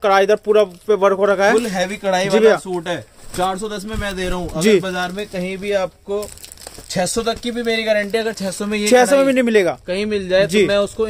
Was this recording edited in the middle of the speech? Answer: no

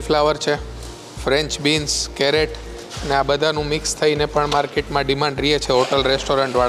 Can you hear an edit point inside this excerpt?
no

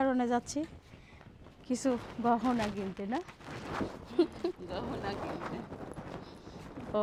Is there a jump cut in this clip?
no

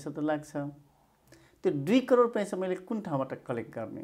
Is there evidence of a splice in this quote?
no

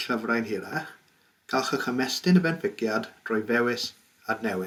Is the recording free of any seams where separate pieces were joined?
yes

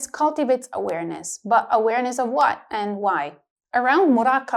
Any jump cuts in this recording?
yes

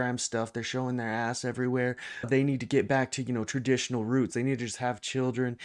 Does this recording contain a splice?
no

